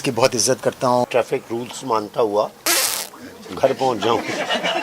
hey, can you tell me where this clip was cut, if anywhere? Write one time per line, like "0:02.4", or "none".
0:01.0